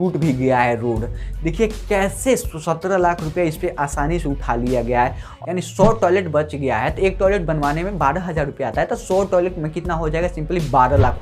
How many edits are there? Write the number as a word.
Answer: one